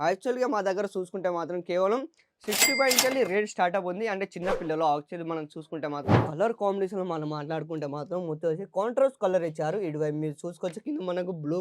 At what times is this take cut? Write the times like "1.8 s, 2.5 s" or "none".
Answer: 6.2 s